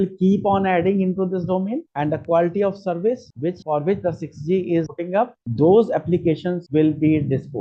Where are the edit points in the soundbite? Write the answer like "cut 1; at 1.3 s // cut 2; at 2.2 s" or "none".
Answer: none

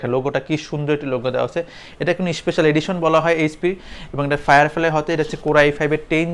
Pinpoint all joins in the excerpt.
none

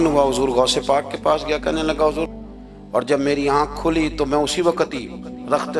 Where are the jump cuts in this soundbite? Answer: cut 1; at 2.3 s

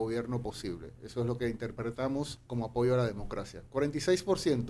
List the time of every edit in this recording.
cut 1; at 2.4 s

